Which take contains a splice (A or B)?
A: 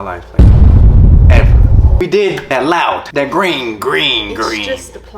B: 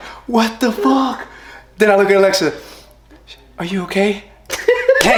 A